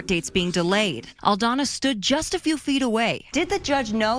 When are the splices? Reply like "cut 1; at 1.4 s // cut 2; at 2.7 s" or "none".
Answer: cut 1; at 1.0 s // cut 2; at 3.3 s